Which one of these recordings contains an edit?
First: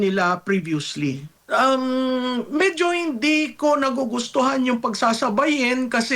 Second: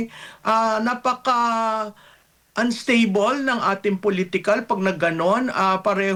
first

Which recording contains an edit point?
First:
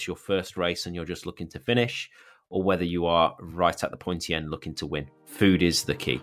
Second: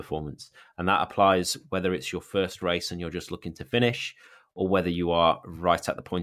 first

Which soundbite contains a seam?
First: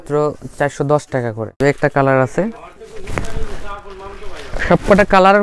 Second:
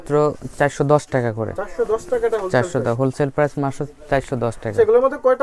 first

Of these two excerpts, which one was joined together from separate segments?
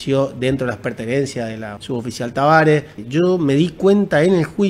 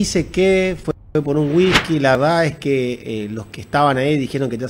first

